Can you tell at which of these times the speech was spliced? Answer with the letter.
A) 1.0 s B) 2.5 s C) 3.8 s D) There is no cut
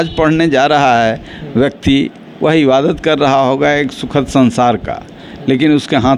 D